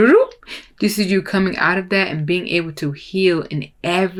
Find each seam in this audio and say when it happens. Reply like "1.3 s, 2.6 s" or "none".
none